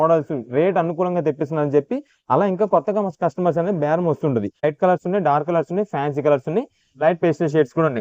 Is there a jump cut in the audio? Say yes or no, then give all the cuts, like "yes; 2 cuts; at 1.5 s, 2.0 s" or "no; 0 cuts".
yes; 1 cut; at 4.6 s